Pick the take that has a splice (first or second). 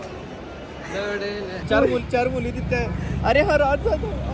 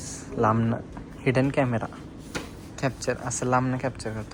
first